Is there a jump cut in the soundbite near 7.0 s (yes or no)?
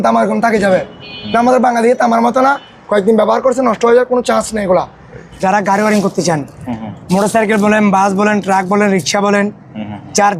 no